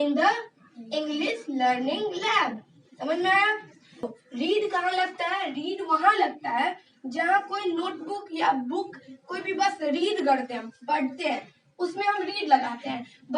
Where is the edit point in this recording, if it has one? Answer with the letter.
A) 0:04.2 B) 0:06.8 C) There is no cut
A